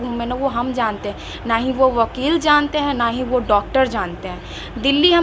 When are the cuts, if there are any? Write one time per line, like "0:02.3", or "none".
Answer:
none